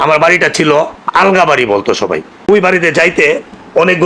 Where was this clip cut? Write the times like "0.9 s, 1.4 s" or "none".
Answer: 2.5 s